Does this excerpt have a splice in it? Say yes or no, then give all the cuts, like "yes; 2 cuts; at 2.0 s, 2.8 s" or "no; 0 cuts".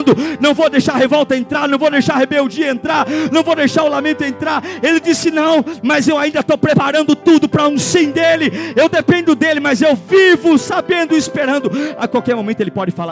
no; 0 cuts